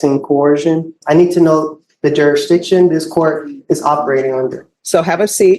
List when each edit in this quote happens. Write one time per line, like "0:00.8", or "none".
0:01.0
0:04.7